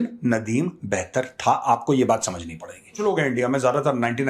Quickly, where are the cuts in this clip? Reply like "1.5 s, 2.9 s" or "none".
3.0 s